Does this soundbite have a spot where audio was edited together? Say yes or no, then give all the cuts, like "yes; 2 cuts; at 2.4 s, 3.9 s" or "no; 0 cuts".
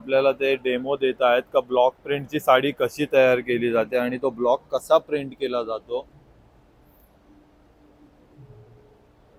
no; 0 cuts